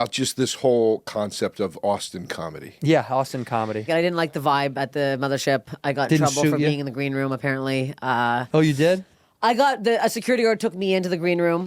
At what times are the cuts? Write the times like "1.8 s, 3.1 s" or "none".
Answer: 3.9 s